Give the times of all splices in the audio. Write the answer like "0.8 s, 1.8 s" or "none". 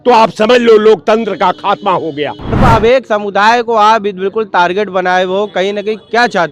2.6 s